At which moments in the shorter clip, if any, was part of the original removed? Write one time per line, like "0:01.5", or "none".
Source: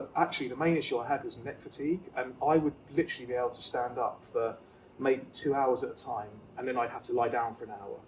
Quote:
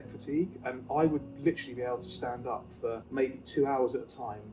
0:03.0